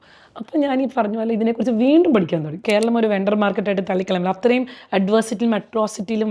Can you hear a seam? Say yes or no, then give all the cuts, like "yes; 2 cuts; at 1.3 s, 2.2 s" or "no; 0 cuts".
yes; 1 cut; at 2.6 s